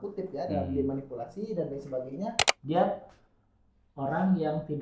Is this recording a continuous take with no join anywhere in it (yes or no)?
no